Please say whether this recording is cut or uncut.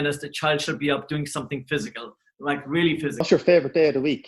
cut